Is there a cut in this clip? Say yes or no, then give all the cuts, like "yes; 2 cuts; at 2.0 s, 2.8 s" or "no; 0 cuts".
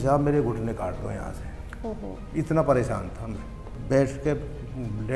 yes; 1 cut; at 3.7 s